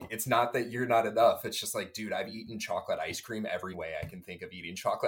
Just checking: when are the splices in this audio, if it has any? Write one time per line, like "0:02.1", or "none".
0:03.8